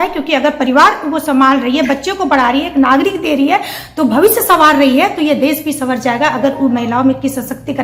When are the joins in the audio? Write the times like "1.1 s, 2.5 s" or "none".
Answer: none